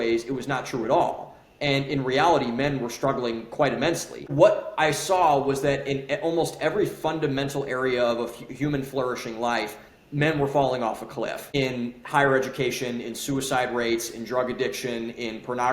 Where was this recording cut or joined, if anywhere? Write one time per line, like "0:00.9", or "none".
0:04.2